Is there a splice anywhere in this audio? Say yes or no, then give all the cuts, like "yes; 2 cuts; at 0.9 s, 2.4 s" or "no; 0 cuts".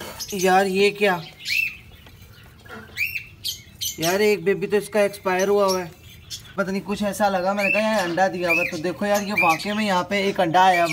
yes; 1 cut; at 6.5 s